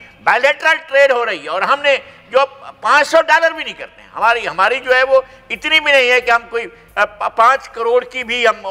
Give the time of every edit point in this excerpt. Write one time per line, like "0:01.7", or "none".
none